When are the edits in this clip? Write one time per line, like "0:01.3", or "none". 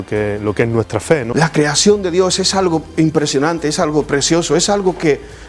0:01.3